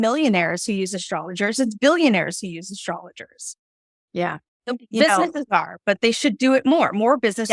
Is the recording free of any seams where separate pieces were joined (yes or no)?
yes